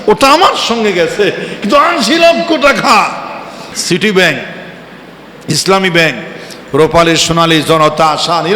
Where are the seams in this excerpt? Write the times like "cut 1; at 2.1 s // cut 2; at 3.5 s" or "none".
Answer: cut 1; at 3.8 s